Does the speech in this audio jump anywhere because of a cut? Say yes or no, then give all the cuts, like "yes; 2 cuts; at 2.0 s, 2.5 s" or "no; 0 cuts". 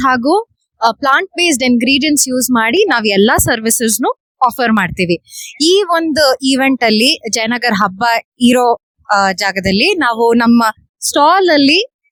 no; 0 cuts